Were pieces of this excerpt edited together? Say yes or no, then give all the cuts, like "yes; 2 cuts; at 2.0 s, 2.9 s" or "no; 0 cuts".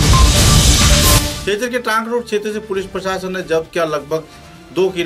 no; 0 cuts